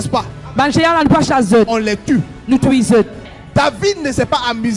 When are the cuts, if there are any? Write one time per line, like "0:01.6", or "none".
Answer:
none